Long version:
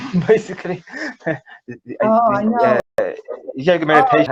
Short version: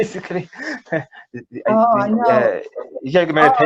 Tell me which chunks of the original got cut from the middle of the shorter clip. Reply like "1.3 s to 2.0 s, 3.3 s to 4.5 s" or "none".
2.8 s to 3.0 s